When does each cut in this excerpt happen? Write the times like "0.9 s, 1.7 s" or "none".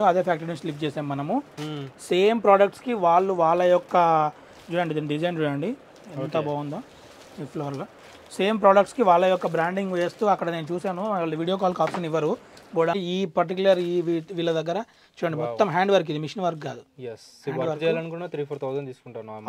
13.0 s